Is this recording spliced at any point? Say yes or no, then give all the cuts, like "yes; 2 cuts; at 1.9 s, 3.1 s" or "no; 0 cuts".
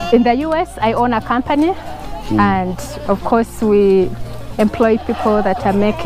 no; 0 cuts